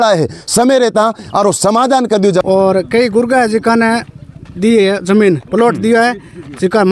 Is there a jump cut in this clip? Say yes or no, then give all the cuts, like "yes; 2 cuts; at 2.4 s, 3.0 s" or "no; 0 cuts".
yes; 1 cut; at 2.4 s